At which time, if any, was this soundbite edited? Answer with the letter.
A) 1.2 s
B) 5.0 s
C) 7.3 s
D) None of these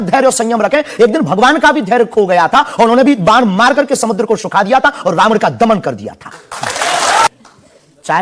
C